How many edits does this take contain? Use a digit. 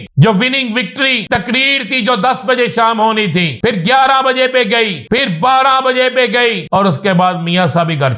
4